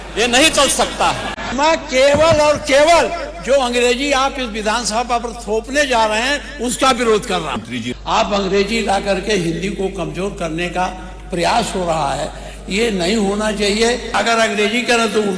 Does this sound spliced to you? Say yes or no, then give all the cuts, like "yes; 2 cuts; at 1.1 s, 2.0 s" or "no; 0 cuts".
yes; 3 cuts; at 1.4 s, 7.6 s, 14.1 s